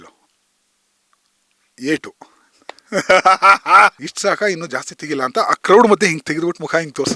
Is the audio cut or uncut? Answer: cut